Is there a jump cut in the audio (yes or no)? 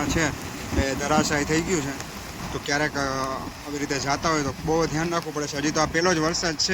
no